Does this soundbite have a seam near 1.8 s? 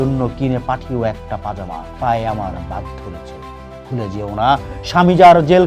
yes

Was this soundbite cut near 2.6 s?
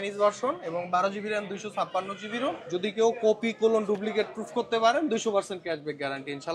yes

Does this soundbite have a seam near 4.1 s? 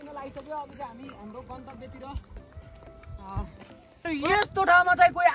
yes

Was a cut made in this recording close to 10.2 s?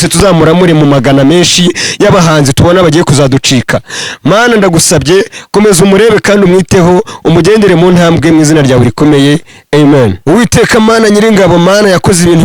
yes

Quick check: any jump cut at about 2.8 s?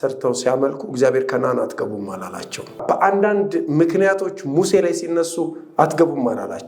yes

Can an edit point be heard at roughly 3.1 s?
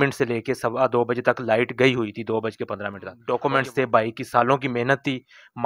yes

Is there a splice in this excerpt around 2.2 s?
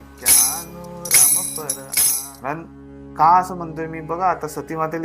yes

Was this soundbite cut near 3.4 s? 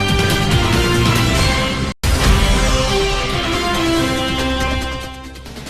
no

